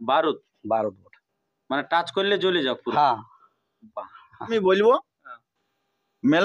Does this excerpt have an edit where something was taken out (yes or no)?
yes